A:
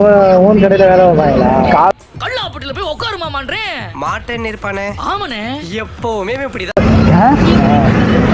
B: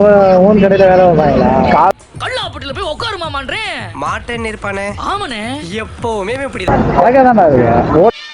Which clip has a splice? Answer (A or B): B